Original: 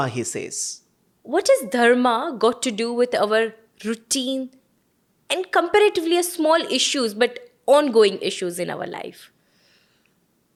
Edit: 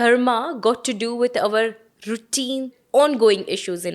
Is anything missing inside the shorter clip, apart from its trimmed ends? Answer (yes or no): yes